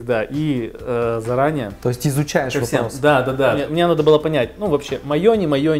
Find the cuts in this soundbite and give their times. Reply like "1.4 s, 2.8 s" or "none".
1.7 s, 3.7 s